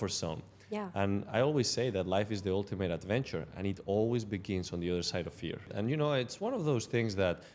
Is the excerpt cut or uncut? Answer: cut